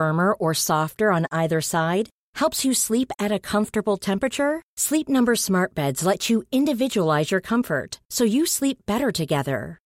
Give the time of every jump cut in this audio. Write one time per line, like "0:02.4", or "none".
none